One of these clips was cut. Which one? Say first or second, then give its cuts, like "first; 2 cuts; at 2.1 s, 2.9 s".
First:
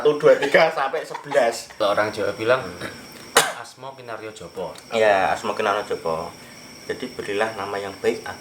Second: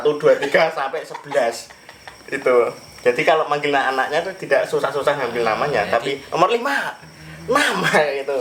first; 1 cut; at 1.7 s